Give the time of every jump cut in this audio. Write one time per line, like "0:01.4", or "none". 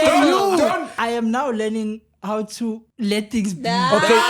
0:00.9
0:02.9